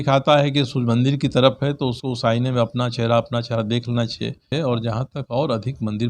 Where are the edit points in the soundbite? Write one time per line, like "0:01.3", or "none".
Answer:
0:04.5